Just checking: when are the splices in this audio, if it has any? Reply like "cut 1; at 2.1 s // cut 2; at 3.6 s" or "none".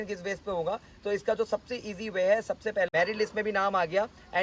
cut 1; at 2.9 s